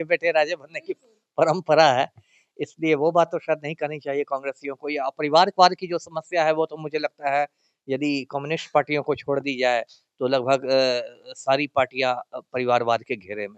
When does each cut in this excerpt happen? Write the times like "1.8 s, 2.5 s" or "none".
none